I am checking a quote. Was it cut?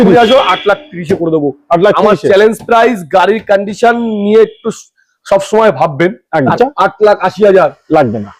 yes; 1 cut; at 6.5 s

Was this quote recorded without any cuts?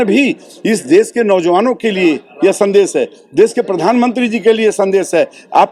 yes; 0 cuts

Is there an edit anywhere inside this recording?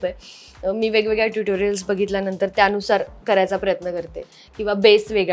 no; 0 cuts

